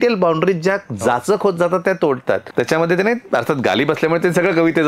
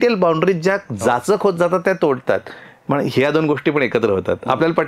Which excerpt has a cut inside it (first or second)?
first